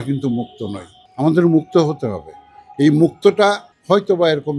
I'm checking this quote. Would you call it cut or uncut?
uncut